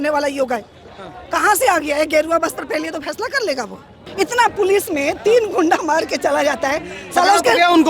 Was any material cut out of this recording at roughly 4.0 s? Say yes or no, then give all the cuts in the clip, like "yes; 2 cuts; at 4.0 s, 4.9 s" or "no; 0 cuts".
yes; 1 cut; at 4.0 s